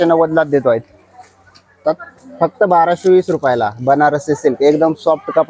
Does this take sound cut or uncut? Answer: cut